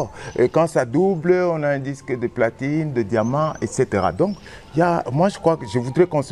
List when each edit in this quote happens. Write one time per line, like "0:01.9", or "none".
none